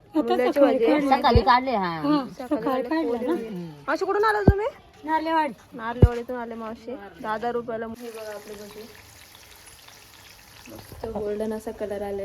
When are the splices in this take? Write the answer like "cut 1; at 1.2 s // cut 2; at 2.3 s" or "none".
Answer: cut 1; at 7.9 s